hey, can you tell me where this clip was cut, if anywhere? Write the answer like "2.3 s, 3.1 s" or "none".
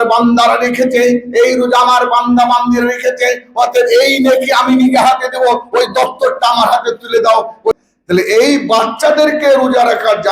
7.7 s